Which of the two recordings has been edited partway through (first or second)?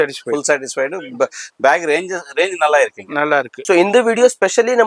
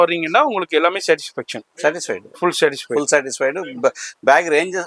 first